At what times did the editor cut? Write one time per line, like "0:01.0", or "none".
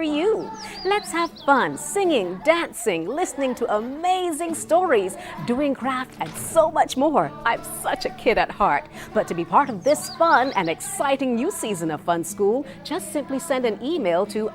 none